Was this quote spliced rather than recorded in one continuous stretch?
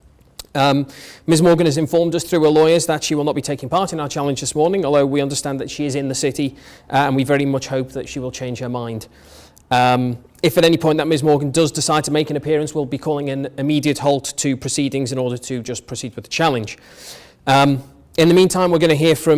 yes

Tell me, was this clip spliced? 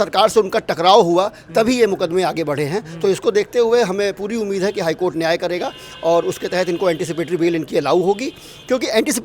no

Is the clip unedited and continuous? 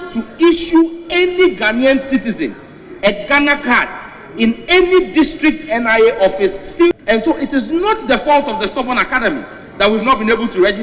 no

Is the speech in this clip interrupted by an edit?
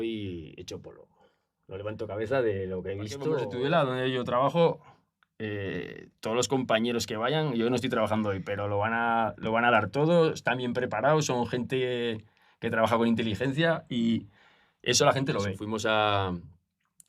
yes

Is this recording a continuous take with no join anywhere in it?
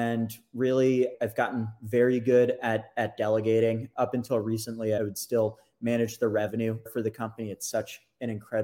no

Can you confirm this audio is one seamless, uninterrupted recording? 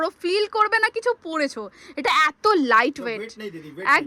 yes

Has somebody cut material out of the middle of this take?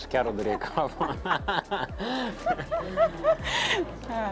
no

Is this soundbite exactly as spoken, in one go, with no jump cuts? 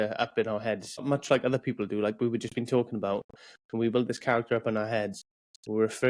no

